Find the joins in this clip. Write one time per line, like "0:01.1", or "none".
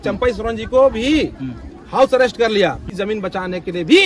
0:02.9